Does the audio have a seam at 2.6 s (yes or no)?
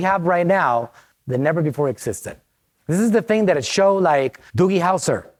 no